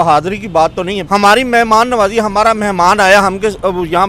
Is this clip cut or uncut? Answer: cut